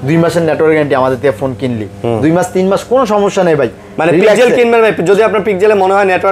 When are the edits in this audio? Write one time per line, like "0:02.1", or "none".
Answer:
none

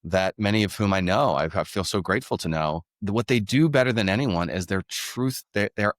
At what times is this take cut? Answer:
0:02.9

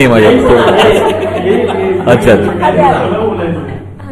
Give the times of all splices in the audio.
none

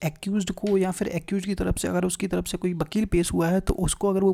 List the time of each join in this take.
none

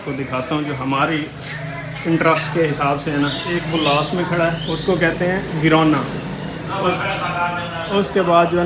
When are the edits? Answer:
none

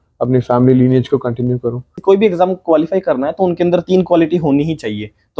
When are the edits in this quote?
0:01.9

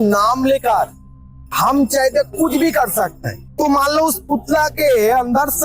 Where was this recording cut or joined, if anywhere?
0:03.4

